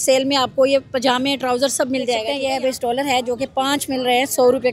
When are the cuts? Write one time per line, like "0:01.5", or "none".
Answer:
0:02.3